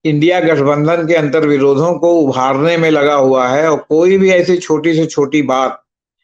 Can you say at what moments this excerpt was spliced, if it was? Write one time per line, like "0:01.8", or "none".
none